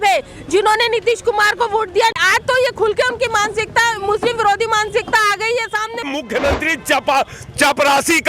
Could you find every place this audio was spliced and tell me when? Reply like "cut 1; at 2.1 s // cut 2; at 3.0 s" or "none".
cut 1; at 2.2 s // cut 2; at 6.1 s